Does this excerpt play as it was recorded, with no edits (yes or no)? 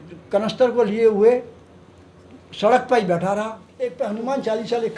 no